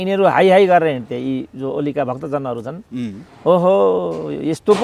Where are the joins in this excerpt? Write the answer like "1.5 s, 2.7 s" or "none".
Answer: none